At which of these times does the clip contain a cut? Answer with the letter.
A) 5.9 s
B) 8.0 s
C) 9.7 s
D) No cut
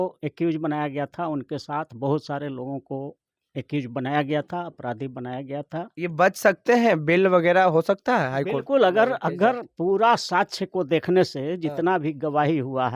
A